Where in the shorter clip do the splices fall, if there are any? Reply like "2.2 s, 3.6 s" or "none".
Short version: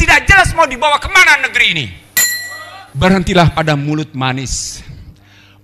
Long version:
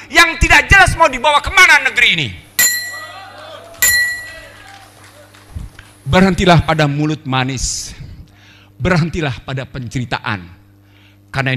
2.9 s